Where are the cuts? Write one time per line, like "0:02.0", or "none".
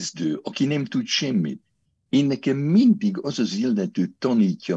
none